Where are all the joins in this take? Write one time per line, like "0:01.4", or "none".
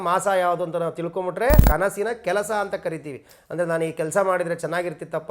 0:01.6